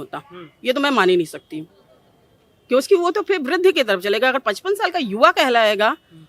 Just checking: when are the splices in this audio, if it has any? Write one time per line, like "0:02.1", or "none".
none